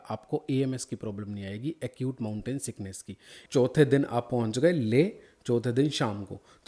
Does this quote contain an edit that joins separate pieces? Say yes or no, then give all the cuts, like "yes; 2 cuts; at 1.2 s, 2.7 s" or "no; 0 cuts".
yes; 1 cut; at 3.4 s